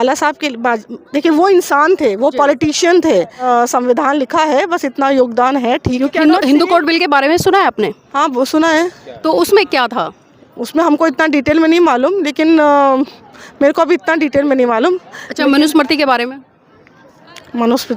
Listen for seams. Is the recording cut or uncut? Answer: cut